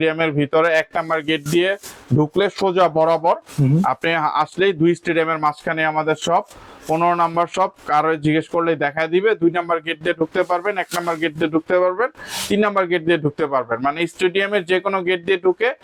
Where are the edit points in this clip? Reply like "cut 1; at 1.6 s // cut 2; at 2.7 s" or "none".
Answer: none